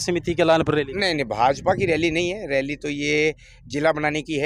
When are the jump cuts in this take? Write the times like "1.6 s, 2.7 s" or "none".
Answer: none